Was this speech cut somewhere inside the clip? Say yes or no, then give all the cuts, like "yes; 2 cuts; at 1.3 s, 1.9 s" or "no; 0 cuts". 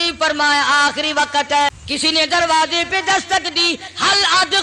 yes; 1 cut; at 1.8 s